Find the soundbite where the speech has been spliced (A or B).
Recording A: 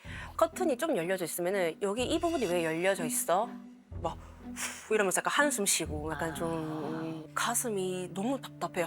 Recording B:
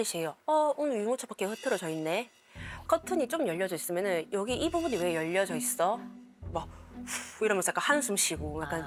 A